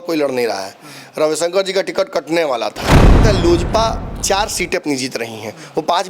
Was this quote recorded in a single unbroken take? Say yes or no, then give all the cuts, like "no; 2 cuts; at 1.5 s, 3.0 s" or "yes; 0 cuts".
no; 1 cut; at 3.2 s